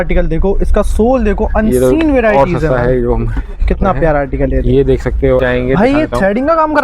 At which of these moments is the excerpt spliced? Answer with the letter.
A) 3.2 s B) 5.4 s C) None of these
B